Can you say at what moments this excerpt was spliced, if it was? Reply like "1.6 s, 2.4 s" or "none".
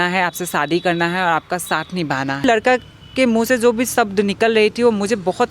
2.4 s